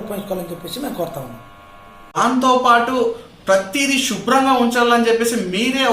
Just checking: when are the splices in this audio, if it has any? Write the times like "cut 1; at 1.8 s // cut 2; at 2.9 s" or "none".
cut 1; at 2.2 s